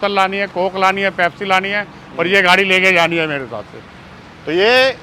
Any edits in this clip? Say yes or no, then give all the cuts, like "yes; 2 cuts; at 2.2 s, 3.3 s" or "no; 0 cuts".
no; 0 cuts